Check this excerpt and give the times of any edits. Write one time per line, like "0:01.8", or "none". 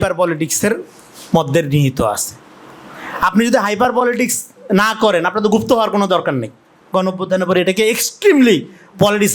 0:06.8